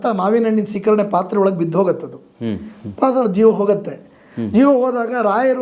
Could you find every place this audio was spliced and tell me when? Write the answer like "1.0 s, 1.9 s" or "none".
none

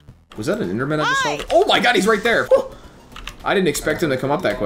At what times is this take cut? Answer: 2.4 s

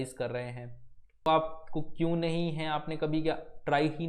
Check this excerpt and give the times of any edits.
1.3 s

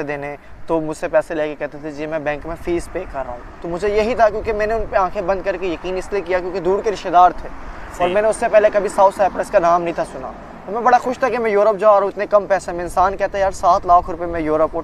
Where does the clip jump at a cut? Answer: none

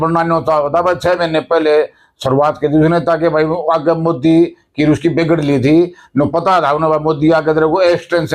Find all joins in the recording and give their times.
none

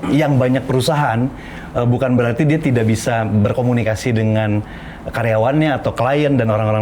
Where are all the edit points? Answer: none

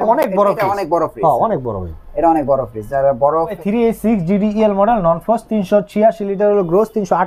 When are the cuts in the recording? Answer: 3.5 s

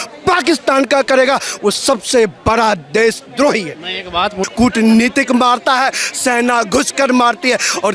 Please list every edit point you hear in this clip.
4.4 s

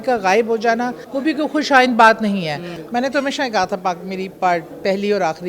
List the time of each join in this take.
1.0 s, 2.7 s

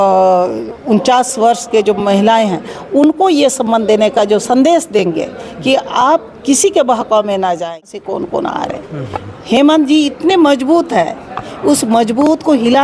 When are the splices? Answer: 8.0 s

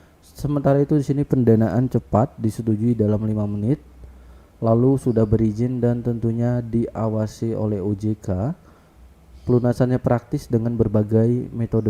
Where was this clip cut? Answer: none

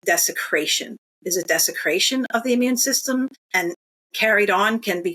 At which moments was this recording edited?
3.4 s

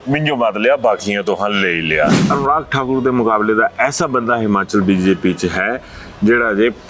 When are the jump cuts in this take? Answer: 2.3 s

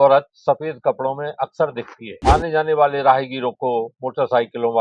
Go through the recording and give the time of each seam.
2.2 s

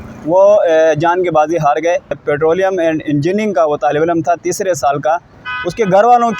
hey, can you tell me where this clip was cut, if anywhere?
2.2 s

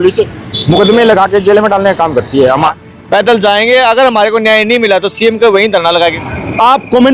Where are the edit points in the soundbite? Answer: 2.7 s, 6.2 s

